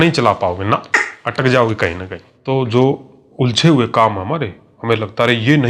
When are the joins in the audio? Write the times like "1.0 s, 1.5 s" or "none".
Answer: 2.3 s